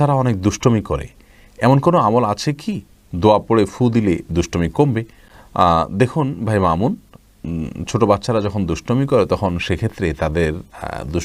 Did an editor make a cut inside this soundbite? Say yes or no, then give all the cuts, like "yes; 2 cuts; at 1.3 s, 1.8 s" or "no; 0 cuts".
no; 0 cuts